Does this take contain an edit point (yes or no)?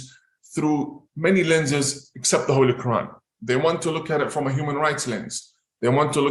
no